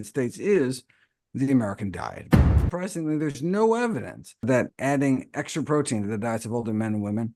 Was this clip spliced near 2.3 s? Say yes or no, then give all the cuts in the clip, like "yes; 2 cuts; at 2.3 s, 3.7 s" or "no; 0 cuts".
yes; 2 cuts; at 2.3 s, 4.7 s